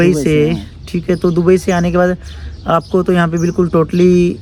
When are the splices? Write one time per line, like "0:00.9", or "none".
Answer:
none